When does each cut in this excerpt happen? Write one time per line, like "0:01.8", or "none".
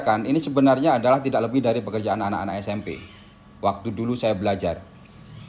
none